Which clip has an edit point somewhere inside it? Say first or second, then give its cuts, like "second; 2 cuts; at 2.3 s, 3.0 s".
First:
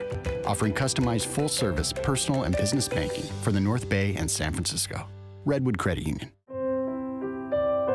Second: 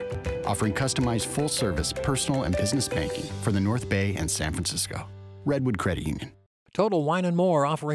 second; 1 cut; at 6.4 s